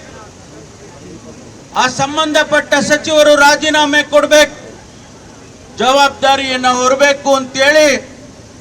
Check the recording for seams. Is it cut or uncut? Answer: uncut